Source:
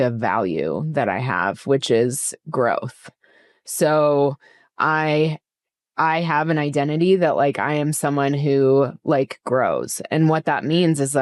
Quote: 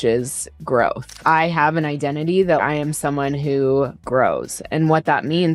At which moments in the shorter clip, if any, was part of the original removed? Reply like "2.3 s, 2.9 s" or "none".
1.1 s, 2.6 s, 4.0 s